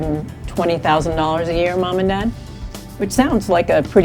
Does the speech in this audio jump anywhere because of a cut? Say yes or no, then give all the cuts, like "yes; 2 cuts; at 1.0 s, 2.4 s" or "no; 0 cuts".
no; 0 cuts